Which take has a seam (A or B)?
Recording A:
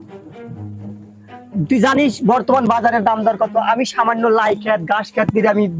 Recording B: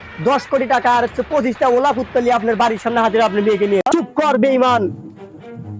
B